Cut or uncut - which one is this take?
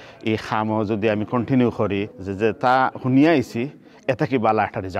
cut